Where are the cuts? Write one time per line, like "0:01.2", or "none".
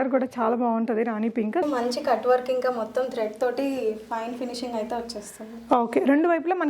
0:01.6